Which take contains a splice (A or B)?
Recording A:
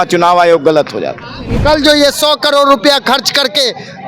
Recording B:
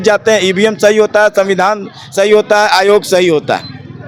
A